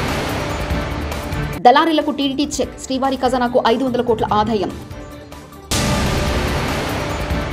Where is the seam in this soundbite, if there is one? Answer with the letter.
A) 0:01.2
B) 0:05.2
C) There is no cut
A